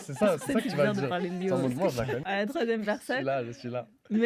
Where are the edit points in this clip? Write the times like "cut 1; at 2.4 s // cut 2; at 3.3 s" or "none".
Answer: cut 1; at 2.1 s